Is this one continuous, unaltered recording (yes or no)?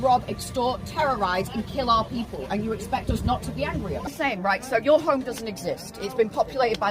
no